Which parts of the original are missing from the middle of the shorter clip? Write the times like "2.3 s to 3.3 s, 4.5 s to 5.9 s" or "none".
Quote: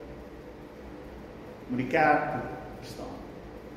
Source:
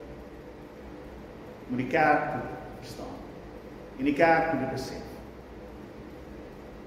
none